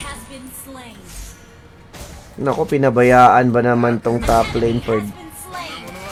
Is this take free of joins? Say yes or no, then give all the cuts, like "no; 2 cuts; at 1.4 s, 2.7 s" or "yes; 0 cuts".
yes; 0 cuts